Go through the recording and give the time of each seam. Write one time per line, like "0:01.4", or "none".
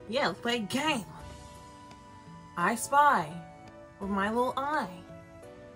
none